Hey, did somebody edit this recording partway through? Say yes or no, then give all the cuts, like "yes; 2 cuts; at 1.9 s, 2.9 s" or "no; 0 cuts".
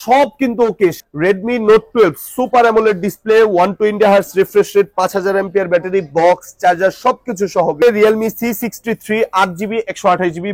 yes; 2 cuts; at 1.0 s, 7.8 s